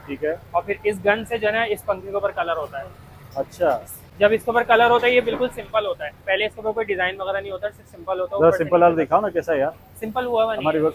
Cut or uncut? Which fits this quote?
uncut